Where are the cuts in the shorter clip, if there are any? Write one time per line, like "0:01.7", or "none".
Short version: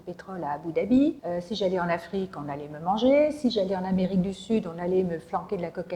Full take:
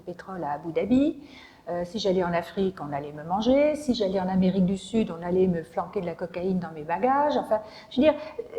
0:01.2